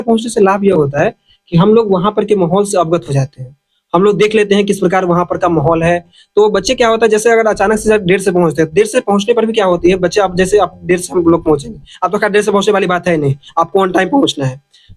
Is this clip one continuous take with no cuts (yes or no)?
yes